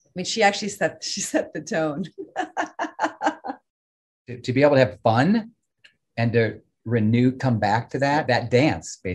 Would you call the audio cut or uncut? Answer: cut